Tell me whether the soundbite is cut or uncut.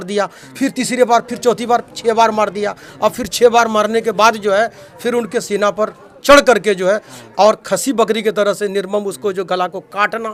uncut